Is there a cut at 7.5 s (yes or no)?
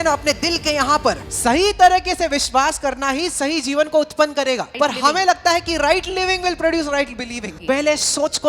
yes